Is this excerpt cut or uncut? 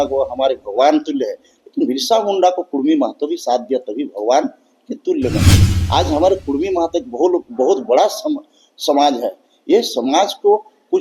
uncut